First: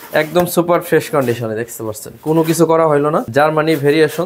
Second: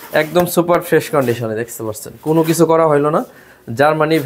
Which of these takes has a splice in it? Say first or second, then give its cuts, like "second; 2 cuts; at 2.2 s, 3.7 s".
first; 1 cut; at 3.2 s